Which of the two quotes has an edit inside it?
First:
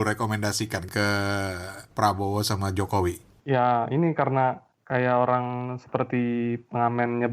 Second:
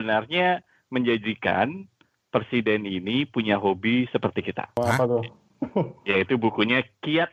first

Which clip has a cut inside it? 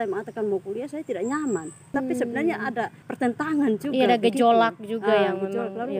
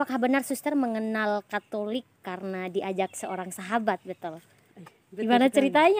first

